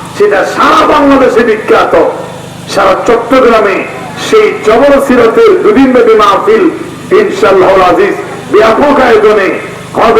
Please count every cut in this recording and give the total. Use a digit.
0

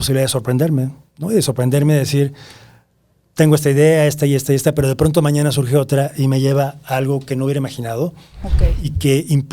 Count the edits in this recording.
0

